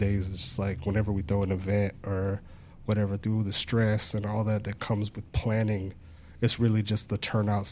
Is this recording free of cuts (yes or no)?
yes